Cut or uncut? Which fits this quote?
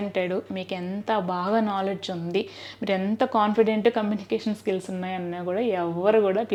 uncut